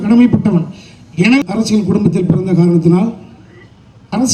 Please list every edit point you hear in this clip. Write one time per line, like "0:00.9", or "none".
0:01.4